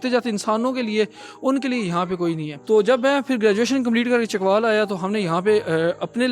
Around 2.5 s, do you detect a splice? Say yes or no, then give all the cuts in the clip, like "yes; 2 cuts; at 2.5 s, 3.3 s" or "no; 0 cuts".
yes; 1 cut; at 2.5 s